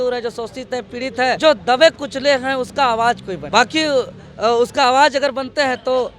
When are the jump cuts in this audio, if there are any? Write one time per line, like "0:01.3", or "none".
none